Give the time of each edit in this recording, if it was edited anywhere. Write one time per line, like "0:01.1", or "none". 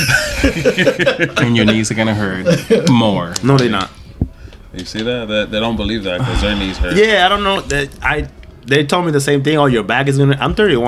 none